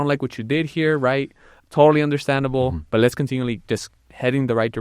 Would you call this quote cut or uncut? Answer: cut